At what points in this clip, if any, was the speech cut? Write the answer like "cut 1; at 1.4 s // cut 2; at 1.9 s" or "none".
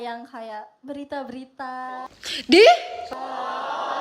none